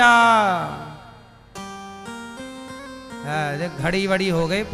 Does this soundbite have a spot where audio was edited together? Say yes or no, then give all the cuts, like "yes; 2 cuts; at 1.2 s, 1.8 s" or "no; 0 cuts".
no; 0 cuts